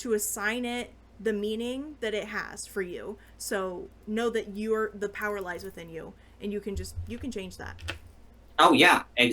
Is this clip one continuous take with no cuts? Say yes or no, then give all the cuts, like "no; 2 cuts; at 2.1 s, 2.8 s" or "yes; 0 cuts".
yes; 0 cuts